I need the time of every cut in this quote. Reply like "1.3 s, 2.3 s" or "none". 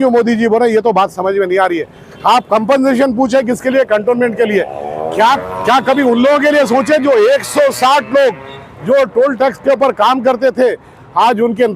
5.4 s